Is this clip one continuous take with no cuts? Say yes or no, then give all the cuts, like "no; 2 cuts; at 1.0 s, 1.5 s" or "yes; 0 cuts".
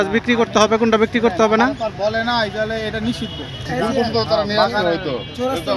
no; 1 cut; at 3.7 s